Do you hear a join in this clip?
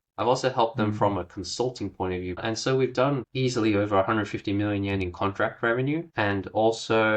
yes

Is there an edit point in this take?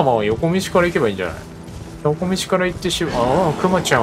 no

